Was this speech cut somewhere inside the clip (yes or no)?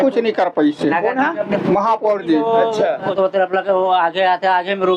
yes